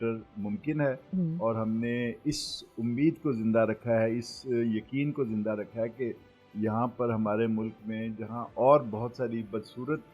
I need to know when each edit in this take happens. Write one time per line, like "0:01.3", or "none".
none